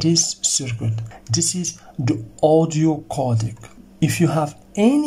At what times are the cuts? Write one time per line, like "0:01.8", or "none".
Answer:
0:01.0
0:03.8